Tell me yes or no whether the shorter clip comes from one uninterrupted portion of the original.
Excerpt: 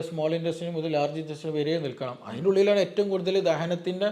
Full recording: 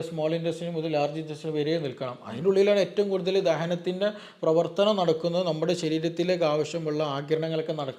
yes